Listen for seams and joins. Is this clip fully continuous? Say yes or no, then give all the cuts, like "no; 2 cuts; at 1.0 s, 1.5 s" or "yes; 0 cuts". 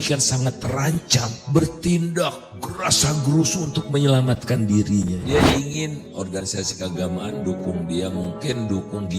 no; 1 cut; at 5.2 s